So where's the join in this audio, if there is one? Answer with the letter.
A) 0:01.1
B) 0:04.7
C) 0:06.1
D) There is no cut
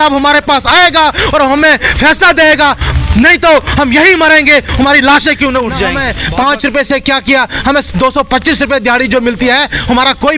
C